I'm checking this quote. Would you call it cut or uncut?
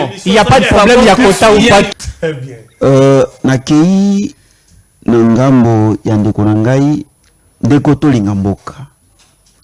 cut